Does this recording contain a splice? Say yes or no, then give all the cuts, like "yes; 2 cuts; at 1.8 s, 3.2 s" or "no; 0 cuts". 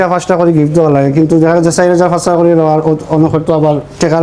no; 0 cuts